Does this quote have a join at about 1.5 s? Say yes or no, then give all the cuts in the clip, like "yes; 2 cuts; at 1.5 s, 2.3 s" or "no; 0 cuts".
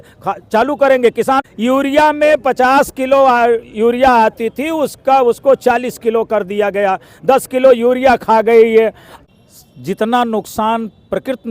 yes; 2 cuts; at 1.5 s, 9.1 s